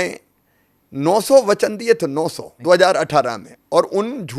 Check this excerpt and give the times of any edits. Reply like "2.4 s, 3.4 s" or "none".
2.5 s